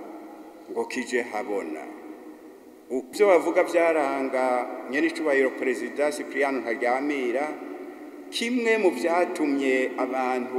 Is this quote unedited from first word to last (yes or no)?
no